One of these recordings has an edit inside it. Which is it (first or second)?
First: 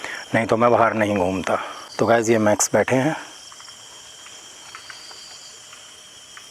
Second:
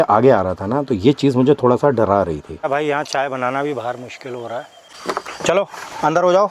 second